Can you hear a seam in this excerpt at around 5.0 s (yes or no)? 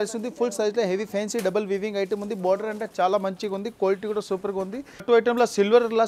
yes